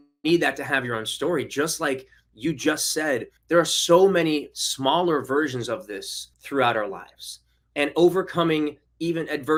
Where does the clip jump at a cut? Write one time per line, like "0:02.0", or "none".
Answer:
none